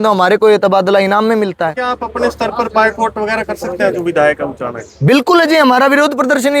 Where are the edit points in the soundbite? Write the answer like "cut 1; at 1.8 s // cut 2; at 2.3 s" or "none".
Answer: cut 1; at 1.8 s

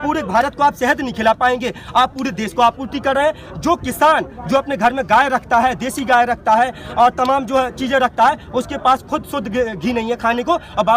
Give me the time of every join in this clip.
none

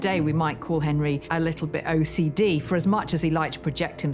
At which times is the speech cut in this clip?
none

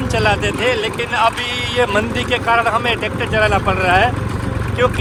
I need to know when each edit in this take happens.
none

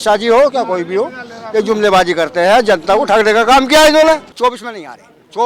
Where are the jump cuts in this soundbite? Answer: cut 1; at 4.3 s

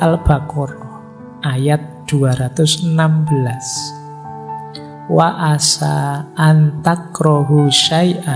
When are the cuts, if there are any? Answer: cut 1; at 3.6 s // cut 2; at 5.1 s

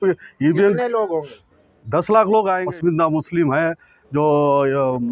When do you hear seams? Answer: cut 1; at 2.6 s

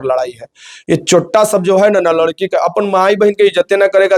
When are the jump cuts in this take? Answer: none

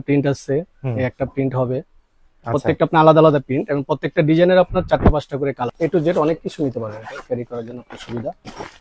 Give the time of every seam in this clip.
cut 1; at 5.7 s

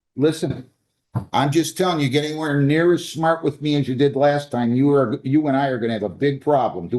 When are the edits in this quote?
none

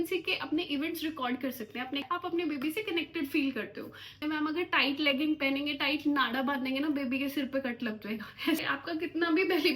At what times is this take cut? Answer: cut 1; at 2.0 s // cut 2; at 4.2 s // cut 3; at 8.6 s

